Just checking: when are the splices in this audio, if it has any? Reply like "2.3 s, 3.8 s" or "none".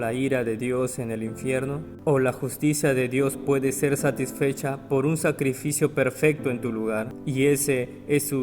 1.9 s, 7.2 s